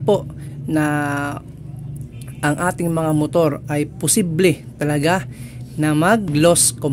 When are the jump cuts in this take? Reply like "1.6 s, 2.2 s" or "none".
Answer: none